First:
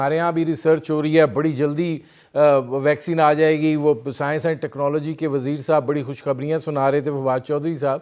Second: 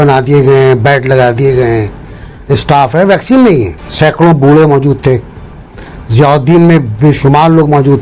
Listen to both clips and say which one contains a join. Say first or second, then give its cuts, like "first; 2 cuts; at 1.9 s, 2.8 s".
second; 1 cut; at 3.8 s